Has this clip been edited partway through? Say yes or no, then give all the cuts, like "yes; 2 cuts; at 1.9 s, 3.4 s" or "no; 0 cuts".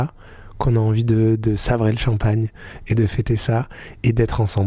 no; 0 cuts